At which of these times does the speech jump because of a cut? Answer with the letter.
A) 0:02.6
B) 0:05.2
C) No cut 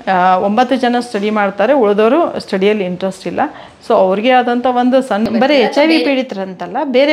B